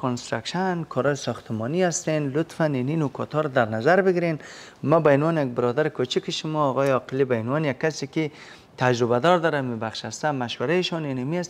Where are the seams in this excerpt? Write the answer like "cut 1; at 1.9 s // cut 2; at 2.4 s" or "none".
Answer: none